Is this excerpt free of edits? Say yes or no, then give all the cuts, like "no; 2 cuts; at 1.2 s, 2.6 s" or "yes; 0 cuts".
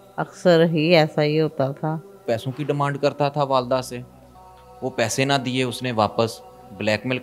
no; 1 cut; at 2.2 s